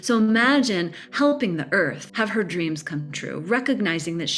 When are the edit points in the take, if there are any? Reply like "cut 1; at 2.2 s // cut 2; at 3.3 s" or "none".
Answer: cut 1; at 2.0 s